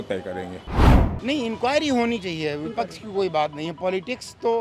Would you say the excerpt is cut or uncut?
cut